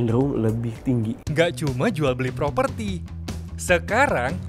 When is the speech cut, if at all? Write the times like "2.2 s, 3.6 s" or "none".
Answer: 1.2 s